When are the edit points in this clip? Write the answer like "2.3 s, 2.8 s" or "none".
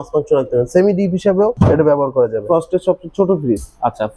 1.5 s, 2.4 s